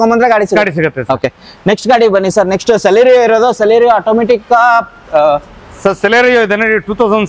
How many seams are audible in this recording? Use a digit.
0